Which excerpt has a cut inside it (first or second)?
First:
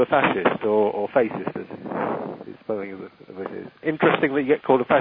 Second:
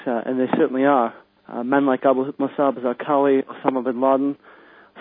first